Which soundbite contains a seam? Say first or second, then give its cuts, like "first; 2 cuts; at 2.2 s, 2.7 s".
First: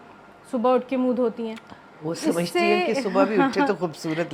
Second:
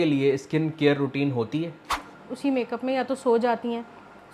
second; 1 cut; at 2.1 s